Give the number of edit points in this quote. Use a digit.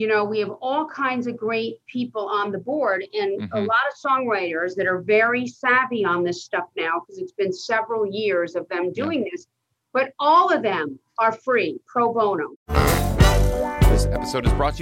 1